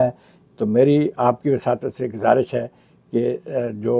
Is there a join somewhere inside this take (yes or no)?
no